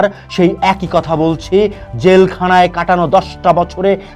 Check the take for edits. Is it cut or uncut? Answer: uncut